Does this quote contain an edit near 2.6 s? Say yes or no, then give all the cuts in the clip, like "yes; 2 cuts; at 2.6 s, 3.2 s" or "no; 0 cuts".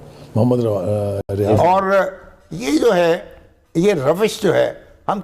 no; 1 cut; at 1.4 s